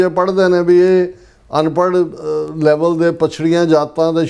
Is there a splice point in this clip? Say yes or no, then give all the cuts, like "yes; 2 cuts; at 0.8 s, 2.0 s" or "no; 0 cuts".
no; 0 cuts